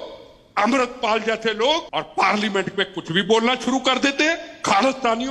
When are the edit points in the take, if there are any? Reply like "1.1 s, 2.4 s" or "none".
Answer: 1.9 s